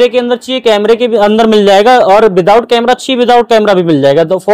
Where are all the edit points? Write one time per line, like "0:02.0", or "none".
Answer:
none